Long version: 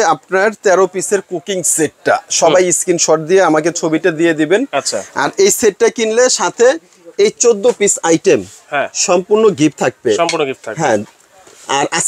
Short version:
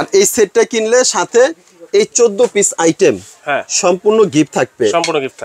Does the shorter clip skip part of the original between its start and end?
no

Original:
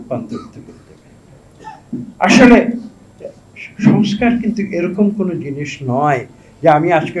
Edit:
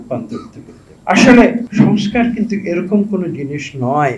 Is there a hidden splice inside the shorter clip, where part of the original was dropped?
yes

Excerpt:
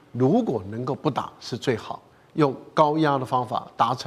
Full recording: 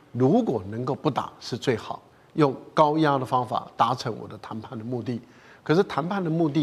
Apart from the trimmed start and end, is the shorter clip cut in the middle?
no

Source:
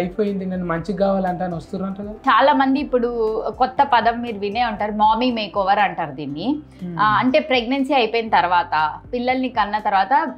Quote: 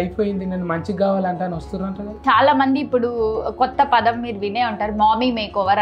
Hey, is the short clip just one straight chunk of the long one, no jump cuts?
yes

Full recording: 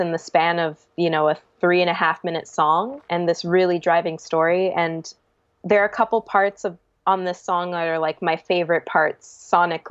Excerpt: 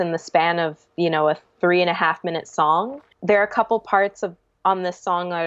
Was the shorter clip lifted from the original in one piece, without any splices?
no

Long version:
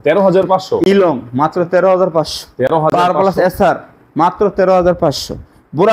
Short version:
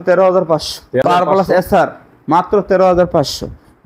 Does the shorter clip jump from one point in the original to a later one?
yes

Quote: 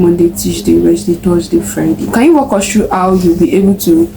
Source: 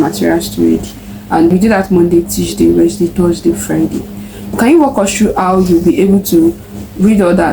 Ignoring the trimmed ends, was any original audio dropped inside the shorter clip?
yes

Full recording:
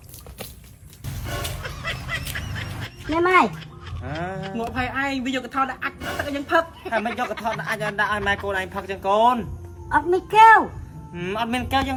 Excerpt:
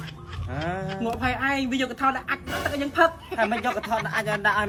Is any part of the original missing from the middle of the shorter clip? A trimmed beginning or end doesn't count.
no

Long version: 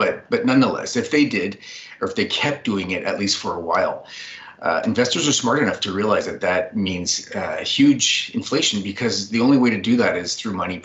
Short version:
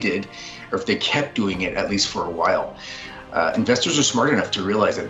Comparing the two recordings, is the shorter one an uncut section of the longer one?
yes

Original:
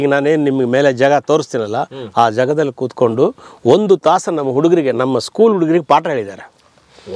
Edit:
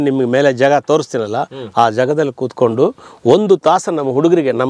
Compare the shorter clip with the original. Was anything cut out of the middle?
no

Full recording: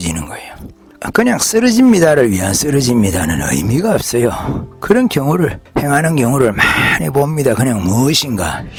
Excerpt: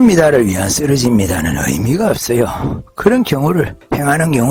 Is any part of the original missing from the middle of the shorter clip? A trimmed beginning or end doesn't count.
no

